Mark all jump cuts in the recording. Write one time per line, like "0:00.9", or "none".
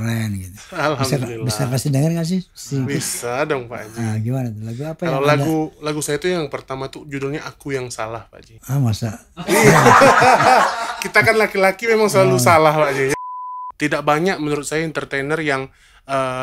0:13.1